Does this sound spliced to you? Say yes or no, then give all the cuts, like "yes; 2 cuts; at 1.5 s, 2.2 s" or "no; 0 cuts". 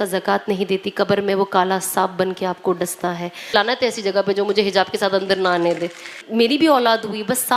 yes; 2 cuts; at 3.5 s, 6.1 s